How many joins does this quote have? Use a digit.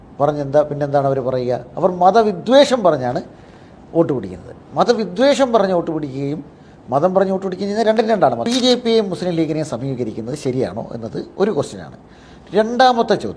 1